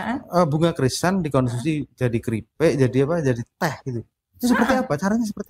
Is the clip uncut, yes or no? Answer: yes